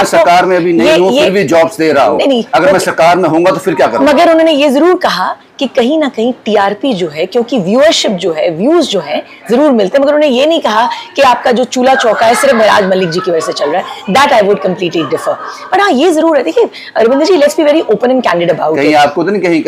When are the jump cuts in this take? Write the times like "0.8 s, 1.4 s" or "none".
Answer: none